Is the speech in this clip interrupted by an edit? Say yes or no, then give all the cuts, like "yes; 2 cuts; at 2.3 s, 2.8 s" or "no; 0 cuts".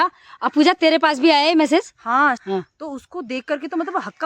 yes; 1 cut; at 2.4 s